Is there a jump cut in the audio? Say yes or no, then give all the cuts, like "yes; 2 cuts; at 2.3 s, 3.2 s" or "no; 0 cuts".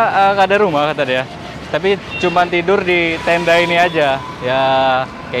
no; 0 cuts